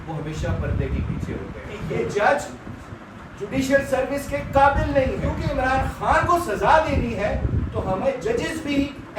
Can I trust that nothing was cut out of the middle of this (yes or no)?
no